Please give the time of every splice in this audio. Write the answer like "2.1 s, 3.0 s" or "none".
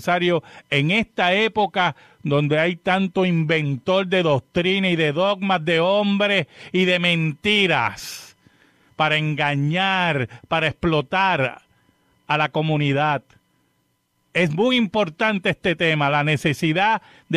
3.2 s